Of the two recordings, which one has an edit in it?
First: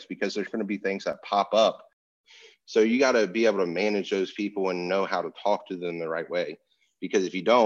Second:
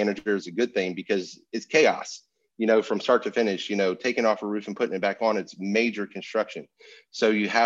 first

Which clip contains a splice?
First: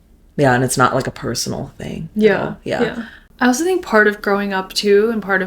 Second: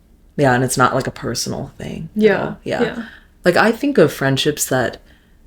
first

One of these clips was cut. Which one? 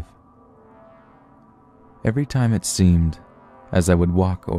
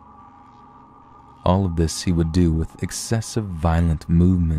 second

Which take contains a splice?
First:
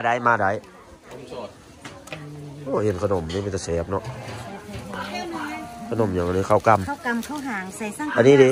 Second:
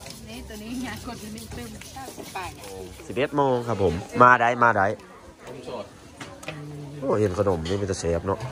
second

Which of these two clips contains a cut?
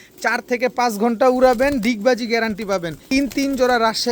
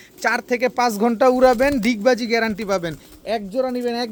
first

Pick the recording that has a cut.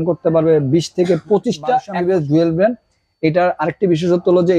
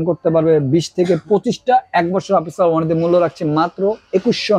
first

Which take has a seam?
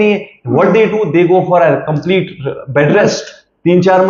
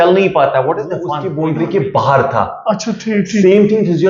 second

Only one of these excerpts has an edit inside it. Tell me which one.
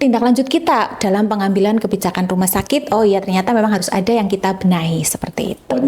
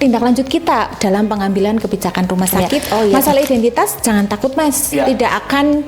second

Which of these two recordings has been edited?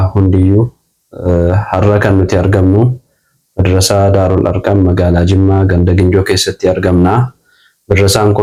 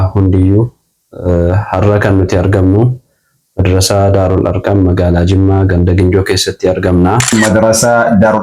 second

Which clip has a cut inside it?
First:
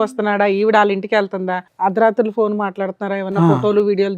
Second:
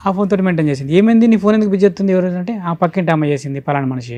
first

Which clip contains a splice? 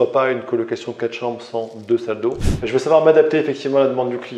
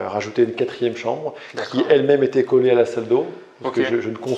first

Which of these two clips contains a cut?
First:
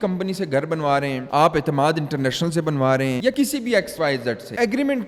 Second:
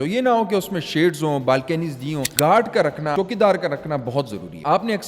second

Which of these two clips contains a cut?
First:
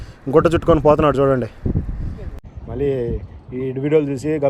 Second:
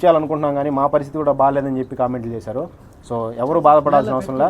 first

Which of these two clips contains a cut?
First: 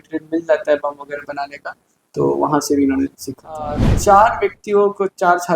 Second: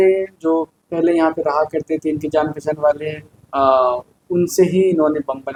first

